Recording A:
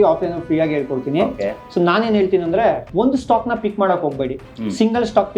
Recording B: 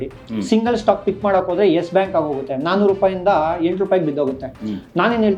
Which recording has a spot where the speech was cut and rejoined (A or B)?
A